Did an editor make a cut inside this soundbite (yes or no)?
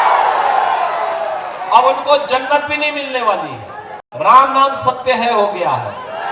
yes